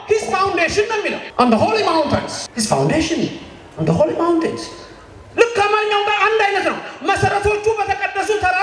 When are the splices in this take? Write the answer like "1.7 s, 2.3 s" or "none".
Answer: 1.2 s, 2.4 s